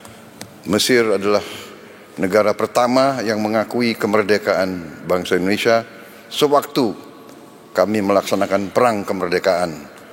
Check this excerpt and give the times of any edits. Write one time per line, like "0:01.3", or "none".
0:08.8